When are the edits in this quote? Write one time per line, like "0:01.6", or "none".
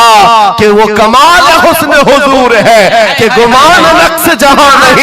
none